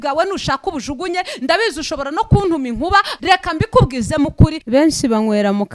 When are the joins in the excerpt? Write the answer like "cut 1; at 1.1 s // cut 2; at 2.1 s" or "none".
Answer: cut 1; at 3.1 s // cut 2; at 4.6 s